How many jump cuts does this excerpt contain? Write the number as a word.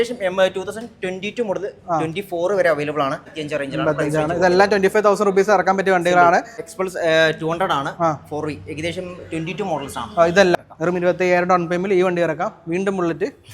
three